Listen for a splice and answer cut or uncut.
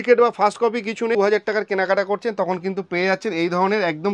cut